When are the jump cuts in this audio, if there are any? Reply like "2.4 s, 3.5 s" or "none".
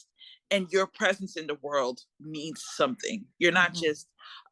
none